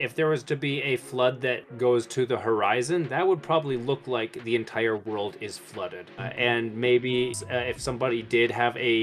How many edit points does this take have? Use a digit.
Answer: 2